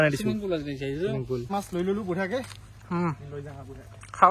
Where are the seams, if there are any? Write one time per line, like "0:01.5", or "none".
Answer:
0:01.4